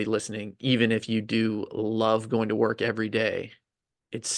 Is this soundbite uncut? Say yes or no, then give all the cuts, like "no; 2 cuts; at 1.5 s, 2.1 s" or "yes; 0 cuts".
yes; 0 cuts